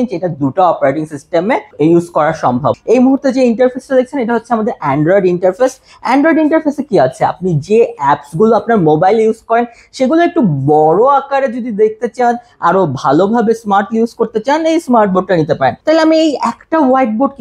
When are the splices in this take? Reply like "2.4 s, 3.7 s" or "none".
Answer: 1.7 s, 2.8 s, 15.8 s